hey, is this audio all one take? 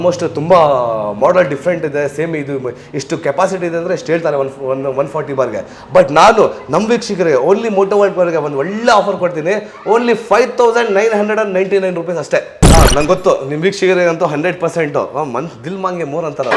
no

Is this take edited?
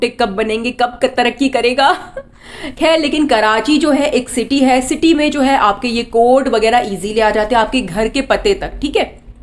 no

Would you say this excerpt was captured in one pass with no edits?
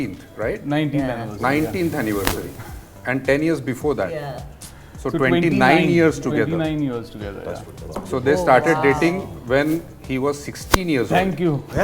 yes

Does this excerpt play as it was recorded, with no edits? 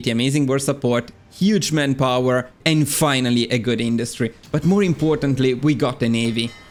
yes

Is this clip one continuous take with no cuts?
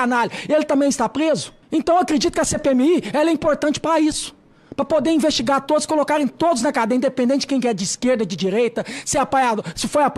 no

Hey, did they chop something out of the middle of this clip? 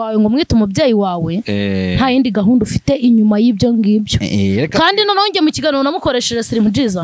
no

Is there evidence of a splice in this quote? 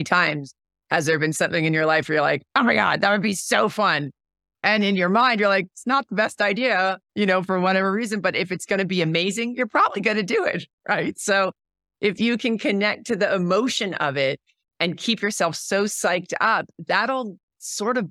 no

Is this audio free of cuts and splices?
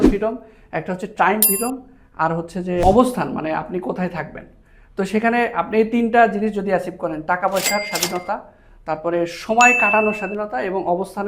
no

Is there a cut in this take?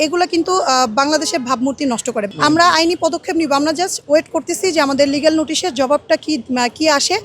yes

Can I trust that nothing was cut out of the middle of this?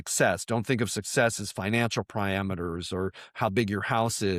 yes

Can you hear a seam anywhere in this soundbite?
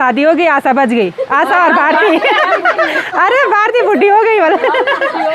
no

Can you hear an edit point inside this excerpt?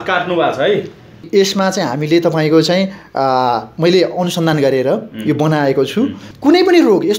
yes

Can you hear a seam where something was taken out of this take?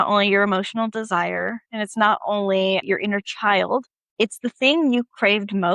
yes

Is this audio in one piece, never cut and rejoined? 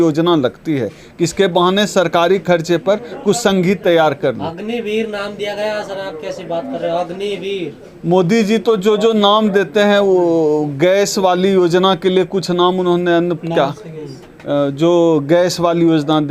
yes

